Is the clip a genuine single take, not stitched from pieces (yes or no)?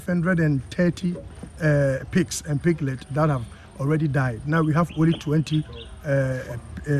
yes